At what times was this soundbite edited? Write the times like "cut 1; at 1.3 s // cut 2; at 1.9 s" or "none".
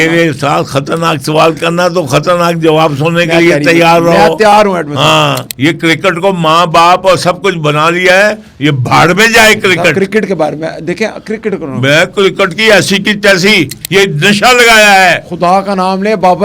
cut 1; at 5.4 s // cut 2; at 13.8 s